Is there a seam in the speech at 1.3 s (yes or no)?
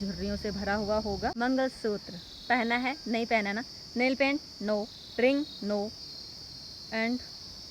yes